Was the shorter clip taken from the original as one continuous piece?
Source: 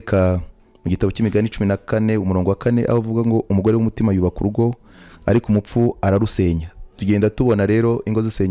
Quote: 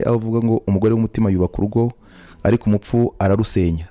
yes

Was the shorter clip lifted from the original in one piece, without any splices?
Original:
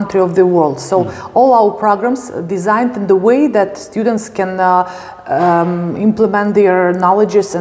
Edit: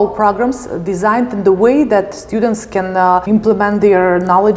no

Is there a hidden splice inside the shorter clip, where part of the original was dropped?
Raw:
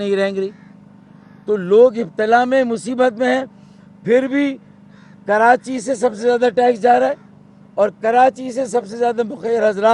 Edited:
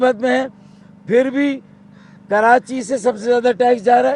no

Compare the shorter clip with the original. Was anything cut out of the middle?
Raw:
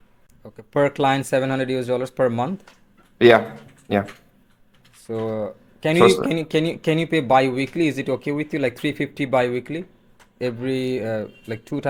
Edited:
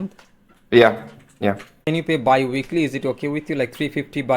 yes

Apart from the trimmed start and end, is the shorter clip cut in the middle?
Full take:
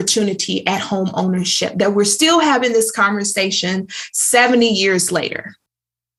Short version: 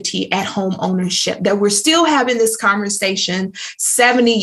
no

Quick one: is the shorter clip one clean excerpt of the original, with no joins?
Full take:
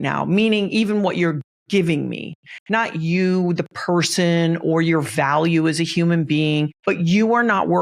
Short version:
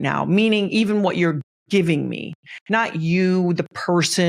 yes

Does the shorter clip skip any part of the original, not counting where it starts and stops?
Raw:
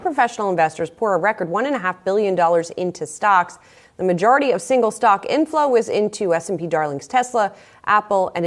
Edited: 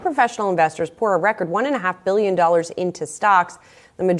no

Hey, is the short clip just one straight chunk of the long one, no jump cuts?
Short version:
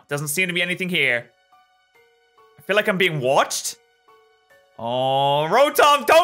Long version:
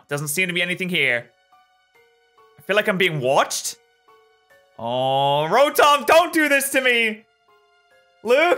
yes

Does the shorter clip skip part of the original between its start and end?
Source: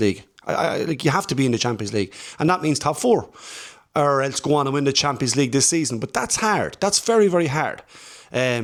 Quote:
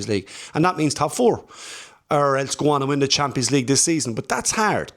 no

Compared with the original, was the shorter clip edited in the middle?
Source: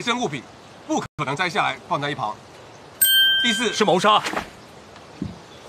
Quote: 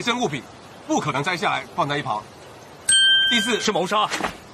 yes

